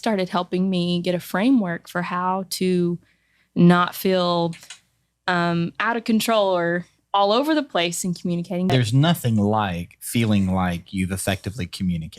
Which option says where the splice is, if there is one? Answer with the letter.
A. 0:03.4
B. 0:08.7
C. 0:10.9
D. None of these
B